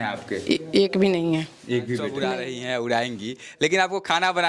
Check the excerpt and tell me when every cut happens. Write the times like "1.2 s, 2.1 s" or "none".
2.3 s